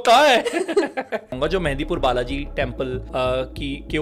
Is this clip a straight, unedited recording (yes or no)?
no